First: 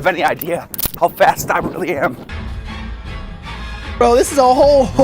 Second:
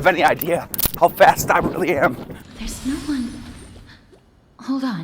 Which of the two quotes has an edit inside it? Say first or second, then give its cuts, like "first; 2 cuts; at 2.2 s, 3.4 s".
first; 2 cuts; at 2.3 s, 4.0 s